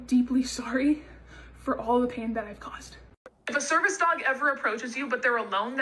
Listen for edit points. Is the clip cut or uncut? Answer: cut